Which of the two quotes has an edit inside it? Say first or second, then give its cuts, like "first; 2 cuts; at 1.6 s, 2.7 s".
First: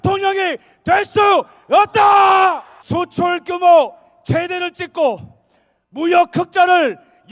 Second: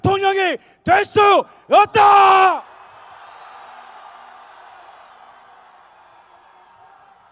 first; 1 cut; at 2.7 s